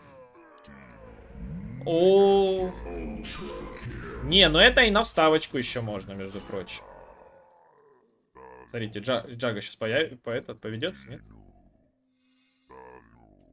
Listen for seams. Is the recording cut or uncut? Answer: uncut